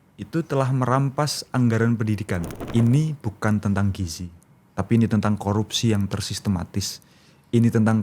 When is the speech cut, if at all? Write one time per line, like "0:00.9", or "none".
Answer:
0:02.6